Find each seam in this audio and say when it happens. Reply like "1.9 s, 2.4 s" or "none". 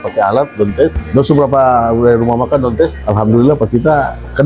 1.0 s, 3.0 s